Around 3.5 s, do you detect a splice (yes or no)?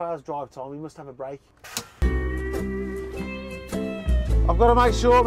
no